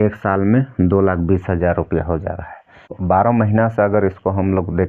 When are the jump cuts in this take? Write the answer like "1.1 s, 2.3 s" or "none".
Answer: 3.0 s